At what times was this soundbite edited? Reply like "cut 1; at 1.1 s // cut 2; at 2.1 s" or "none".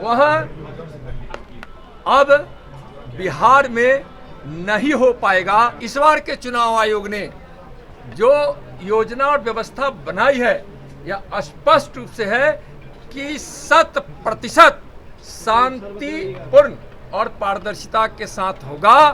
cut 1; at 5.8 s